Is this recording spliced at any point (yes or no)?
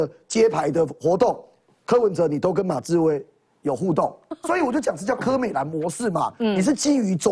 yes